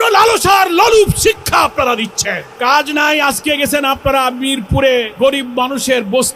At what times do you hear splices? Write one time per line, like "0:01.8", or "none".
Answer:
0:02.5
0:05.1